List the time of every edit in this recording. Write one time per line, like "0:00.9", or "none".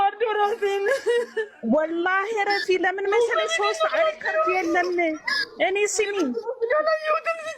none